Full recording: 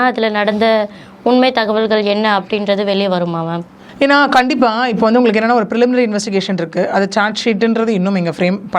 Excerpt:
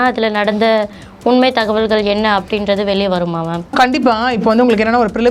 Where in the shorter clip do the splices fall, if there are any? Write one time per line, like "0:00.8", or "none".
0:03.7